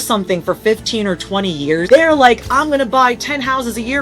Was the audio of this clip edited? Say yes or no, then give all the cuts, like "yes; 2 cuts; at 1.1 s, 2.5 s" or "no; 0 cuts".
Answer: yes; 1 cut; at 1.8 s